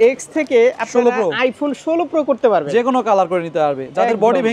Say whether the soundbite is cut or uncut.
uncut